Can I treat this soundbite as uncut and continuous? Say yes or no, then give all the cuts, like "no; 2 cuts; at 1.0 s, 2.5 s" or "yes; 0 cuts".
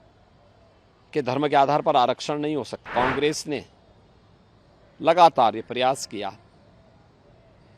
no; 1 cut; at 2.8 s